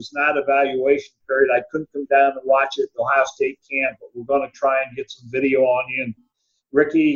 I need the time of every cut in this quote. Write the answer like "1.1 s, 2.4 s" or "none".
none